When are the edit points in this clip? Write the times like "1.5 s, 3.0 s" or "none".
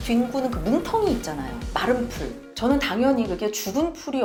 none